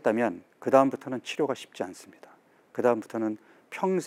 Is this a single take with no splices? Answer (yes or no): yes